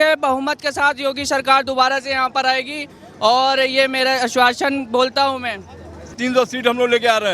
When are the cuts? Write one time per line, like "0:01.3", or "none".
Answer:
0:06.2